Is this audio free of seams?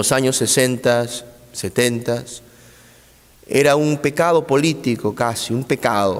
yes; 0 cuts

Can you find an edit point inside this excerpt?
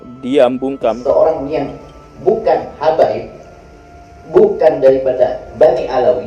yes; 1 cut; at 1.0 s

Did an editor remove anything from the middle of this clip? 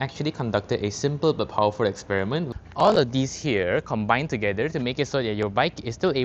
yes; 1 cut; at 2.5 s

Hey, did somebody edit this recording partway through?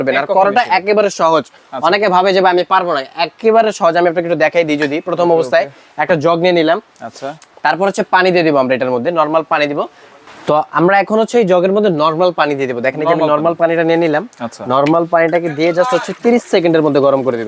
no; 0 cuts

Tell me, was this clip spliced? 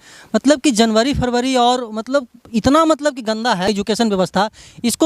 yes; 1 cut; at 3.7 s

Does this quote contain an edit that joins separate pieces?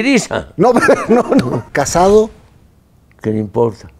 yes; 1 cut; at 1.6 s

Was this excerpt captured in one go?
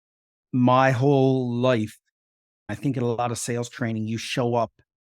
no; 1 cut; at 2.7 s

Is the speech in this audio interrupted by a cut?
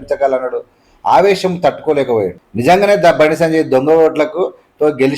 yes; 1 cut; at 2.4 s

